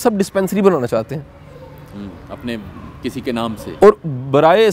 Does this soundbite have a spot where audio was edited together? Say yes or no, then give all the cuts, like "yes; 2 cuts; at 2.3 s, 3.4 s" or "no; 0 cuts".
no; 0 cuts